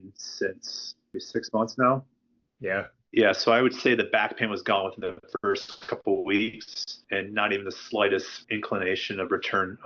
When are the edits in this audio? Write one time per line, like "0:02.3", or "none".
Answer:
none